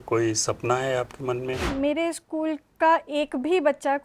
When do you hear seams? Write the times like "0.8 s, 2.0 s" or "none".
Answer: 1.7 s